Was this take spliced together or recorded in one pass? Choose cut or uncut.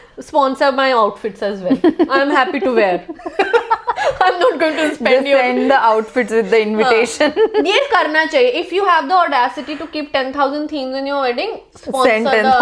uncut